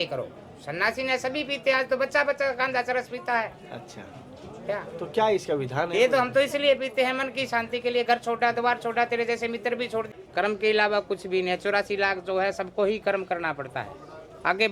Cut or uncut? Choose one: cut